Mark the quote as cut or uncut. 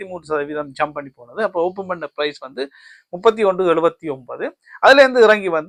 uncut